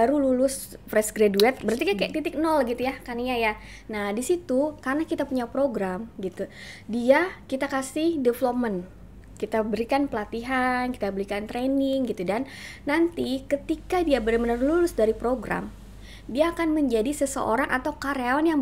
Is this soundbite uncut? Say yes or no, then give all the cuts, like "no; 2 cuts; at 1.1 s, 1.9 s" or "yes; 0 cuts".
yes; 0 cuts